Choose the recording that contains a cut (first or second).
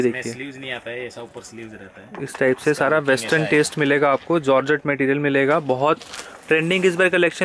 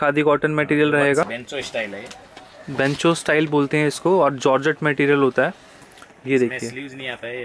second